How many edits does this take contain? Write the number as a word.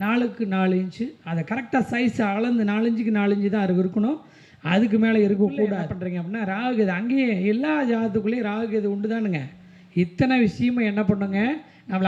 one